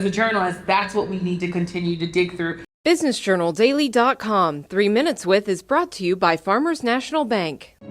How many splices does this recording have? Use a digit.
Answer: 1